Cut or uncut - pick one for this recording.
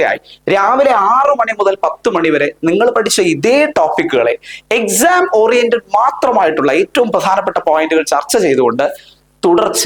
uncut